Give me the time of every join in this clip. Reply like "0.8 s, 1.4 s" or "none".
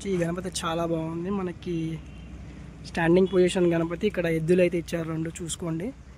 none